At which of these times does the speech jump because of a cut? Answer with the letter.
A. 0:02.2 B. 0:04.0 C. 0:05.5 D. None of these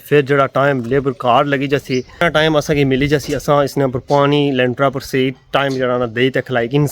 A